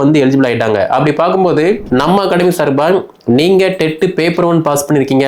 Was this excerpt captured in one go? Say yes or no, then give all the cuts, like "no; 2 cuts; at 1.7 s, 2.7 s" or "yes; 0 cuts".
no; 1 cut; at 1.8 s